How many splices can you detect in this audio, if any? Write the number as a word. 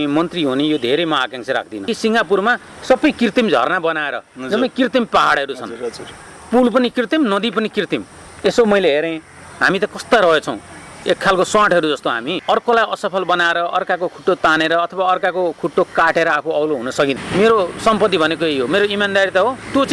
three